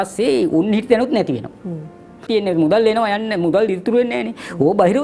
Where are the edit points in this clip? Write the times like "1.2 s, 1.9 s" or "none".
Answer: 2.2 s